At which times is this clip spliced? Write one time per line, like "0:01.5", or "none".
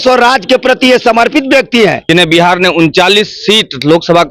0:02.0